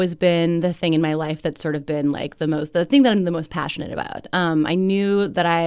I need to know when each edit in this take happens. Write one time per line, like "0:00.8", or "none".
none